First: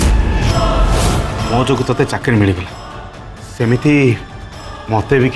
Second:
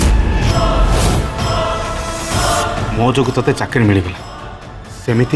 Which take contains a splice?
first; 1 cut; at 1.3 s

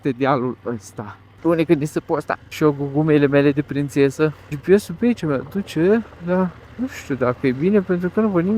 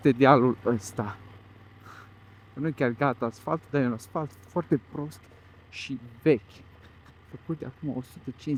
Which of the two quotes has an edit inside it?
first; 4 cuts; at 1.3 s, 2.5 s, 4.5 s, 6.7 s

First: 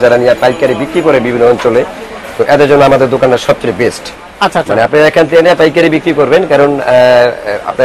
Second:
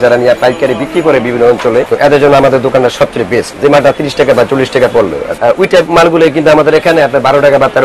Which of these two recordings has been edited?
second; 3 cuts; at 1.9 s, 3.5 s, 5.2 s

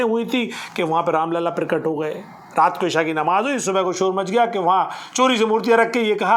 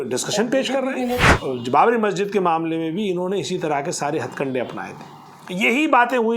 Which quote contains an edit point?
second; 1 cut; at 1.2 s

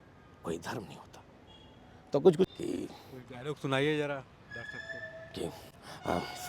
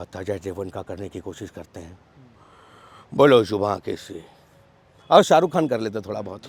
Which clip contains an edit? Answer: first; 1 cut; at 2.5 s

